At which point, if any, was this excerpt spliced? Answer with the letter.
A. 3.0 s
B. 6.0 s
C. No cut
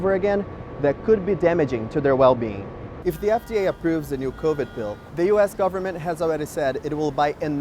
A